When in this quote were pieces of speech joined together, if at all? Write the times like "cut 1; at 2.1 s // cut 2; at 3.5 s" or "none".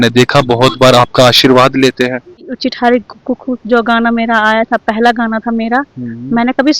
cut 1; at 2.5 s